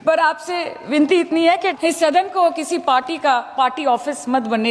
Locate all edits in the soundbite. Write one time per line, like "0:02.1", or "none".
0:01.7

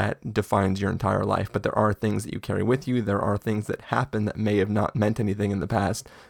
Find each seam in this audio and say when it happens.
none

